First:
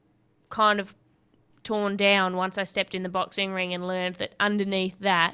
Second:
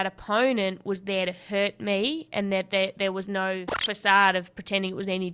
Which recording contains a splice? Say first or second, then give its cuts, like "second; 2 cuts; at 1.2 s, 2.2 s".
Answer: second; 1 cut; at 3.7 s